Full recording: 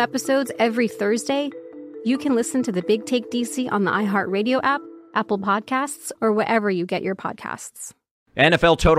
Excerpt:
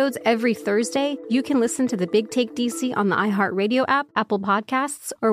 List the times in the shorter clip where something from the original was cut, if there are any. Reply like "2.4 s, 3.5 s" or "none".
1.2 s, 4.1 s